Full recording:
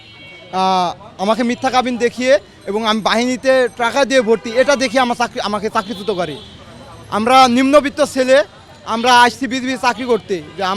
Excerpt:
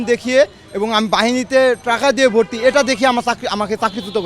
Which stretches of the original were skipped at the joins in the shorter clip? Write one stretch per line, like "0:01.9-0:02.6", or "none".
none